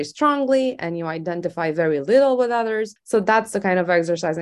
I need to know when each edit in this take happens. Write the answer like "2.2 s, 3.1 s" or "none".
2.9 s